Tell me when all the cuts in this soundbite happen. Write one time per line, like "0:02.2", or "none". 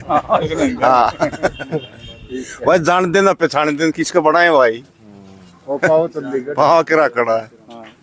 none